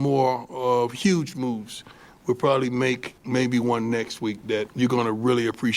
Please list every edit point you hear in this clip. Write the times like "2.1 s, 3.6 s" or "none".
3.1 s, 4.7 s